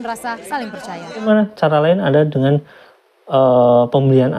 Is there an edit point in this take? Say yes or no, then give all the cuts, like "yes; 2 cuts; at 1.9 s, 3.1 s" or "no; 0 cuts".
yes; 1 cut; at 1.3 s